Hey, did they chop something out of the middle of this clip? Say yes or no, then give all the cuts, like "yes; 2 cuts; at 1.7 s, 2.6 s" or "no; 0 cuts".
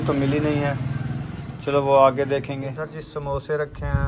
yes; 1 cut; at 2.7 s